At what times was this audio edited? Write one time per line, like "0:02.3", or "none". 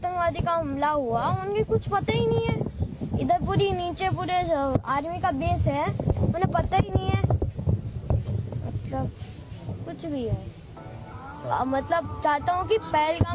none